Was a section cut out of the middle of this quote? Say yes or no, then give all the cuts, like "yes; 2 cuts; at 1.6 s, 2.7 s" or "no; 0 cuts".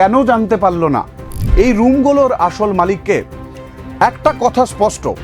yes; 1 cut; at 1.4 s